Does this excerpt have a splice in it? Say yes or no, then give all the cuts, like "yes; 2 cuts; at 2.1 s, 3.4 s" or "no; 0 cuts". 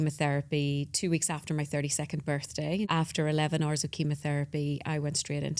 yes; 1 cut; at 2.9 s